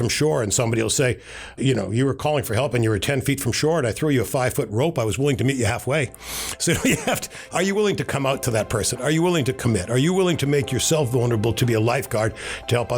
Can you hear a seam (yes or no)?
yes